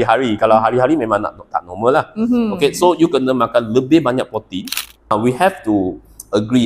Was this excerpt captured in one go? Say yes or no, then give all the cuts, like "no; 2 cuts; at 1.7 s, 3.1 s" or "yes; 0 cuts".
no; 1 cut; at 5.1 s